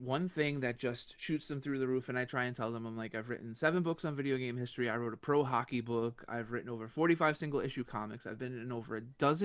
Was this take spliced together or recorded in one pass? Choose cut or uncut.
uncut